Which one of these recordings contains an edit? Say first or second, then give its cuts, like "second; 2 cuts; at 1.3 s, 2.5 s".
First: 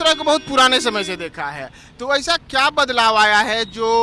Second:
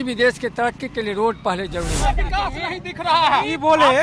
second; 1 cut; at 2.0 s